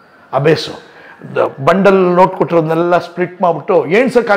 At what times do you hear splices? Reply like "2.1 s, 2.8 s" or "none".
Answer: none